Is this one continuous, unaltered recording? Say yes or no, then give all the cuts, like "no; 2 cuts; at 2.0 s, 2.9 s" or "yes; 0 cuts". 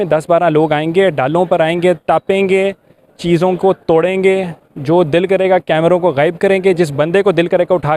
yes; 0 cuts